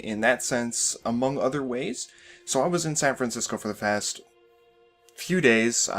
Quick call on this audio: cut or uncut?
cut